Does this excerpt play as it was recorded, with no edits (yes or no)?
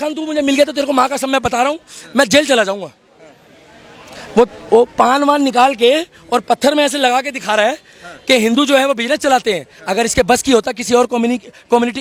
yes